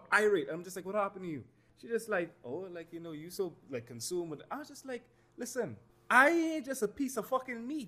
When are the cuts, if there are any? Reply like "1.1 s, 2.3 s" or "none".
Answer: 1.6 s, 5.9 s